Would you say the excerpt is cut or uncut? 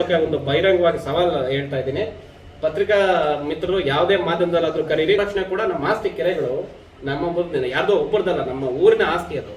cut